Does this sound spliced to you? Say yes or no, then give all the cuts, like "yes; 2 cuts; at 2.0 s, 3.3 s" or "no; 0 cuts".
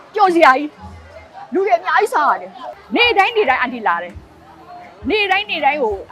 yes; 1 cut; at 2.8 s